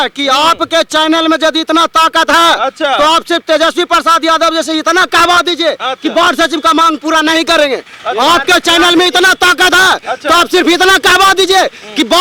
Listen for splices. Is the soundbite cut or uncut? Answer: uncut